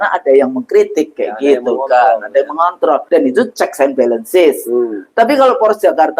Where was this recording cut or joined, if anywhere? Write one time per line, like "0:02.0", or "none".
0:03.0

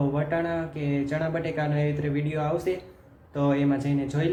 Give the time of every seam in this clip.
none

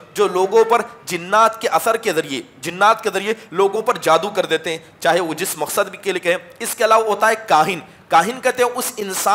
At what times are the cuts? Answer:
none

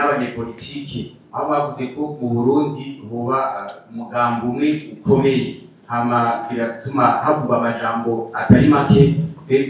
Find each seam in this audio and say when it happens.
none

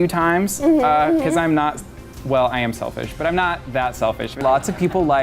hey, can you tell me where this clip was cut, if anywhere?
0:04.3

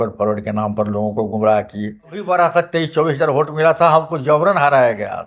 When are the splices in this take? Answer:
0:02.2

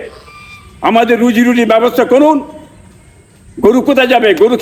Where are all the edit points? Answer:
none

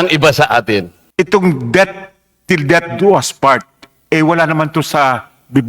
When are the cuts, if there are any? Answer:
0:01.0

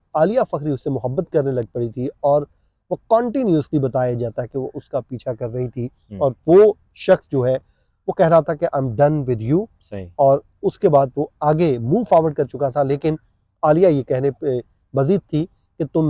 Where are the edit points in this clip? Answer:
none

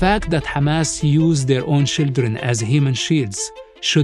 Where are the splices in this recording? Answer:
none

